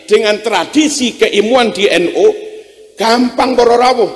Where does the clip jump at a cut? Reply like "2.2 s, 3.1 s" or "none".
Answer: none